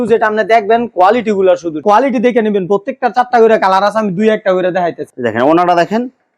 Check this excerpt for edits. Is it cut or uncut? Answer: cut